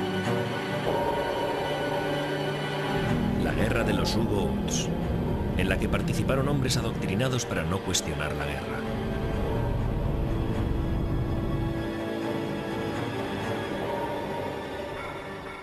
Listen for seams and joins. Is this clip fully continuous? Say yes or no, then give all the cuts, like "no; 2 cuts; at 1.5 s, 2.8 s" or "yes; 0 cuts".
yes; 0 cuts